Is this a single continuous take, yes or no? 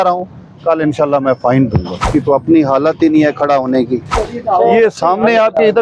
no